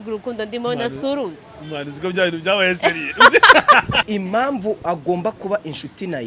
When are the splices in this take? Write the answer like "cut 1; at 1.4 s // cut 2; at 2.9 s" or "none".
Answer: cut 1; at 4.1 s

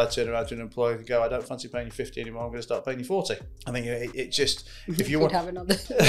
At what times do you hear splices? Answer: cut 1; at 3.5 s

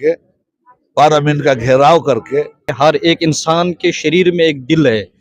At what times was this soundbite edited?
cut 1; at 2.7 s

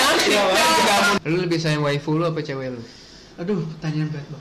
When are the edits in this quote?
cut 1; at 1.2 s

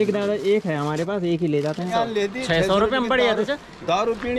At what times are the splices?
cut 1; at 1.9 s

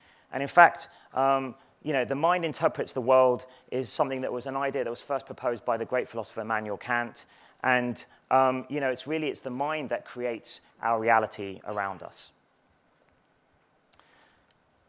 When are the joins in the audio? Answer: cut 1; at 1.3 s

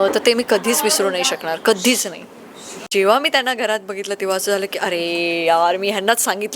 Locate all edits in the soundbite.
cut 1; at 2.9 s

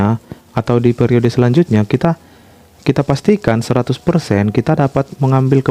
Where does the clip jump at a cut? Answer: none

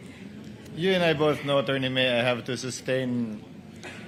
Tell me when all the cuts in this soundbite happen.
none

